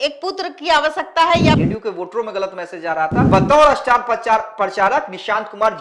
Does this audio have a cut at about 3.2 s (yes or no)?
yes